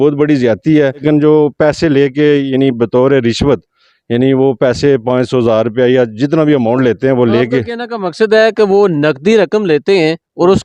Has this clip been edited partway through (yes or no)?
yes